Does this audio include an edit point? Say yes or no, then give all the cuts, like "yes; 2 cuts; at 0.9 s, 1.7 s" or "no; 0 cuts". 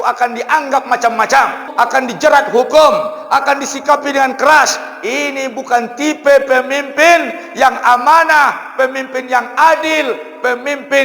yes; 1 cut; at 1.7 s